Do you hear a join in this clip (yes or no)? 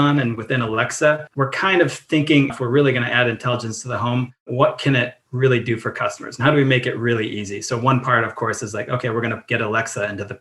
yes